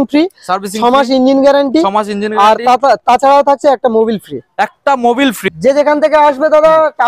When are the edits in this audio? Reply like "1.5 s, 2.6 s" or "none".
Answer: 5.5 s